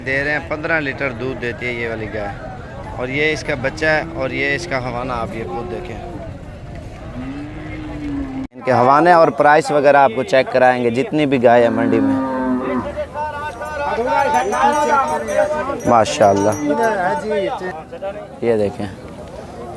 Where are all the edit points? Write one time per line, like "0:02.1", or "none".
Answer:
0:08.6